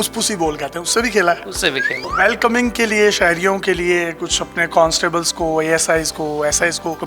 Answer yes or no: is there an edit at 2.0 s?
yes